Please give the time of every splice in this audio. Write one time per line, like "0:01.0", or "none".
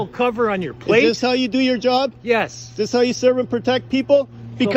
none